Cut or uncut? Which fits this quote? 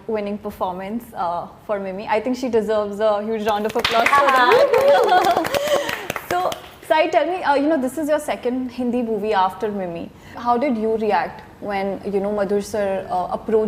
uncut